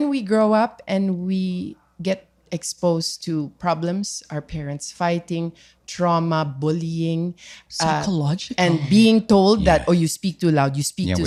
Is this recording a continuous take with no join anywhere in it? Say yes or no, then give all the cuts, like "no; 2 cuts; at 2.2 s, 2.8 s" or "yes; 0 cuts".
yes; 0 cuts